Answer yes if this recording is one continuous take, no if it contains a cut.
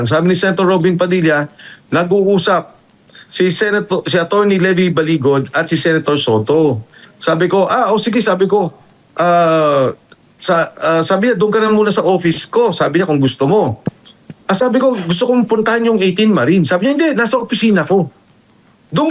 yes